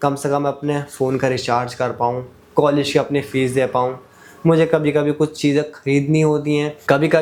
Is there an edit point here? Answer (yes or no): no